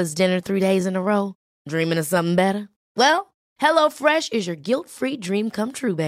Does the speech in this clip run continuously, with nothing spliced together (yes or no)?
yes